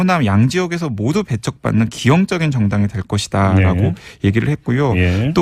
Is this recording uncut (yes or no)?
no